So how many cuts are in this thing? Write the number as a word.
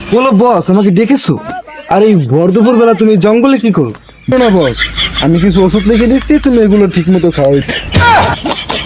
two